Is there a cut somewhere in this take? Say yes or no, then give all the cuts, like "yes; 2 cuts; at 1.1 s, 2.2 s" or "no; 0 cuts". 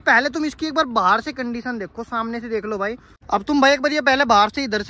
yes; 1 cut; at 3.1 s